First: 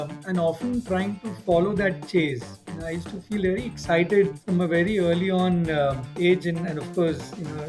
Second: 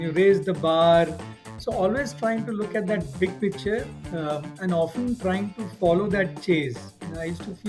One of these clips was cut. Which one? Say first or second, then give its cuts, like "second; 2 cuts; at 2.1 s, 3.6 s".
first; 2 cuts; at 4.4 s, 6.1 s